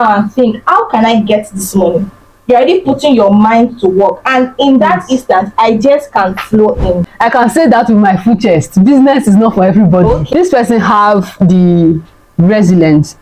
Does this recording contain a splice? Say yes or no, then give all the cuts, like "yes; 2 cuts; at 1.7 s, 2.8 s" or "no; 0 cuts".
yes; 2 cuts; at 7.1 s, 10.2 s